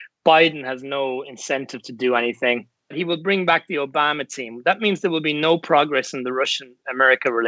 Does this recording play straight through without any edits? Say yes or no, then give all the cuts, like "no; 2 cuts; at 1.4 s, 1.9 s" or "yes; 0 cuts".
no; 1 cut; at 2.9 s